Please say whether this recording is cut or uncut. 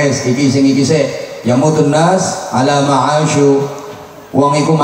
uncut